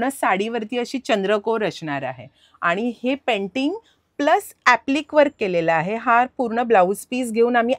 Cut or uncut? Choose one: uncut